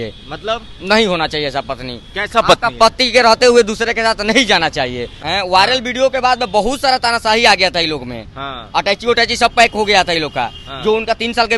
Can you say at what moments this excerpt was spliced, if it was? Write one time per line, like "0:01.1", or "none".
0:05.2